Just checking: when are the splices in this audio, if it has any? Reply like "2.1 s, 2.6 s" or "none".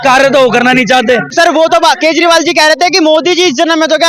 1.3 s